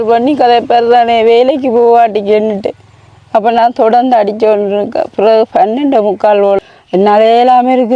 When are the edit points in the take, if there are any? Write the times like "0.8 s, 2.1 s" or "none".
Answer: 6.6 s